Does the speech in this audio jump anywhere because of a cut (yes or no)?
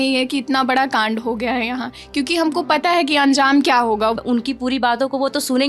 yes